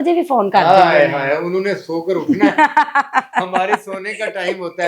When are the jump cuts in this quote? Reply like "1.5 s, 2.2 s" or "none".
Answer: none